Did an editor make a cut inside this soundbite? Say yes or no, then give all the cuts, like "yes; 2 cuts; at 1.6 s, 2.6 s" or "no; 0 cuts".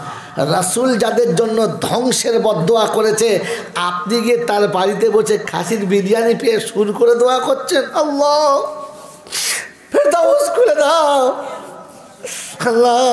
no; 0 cuts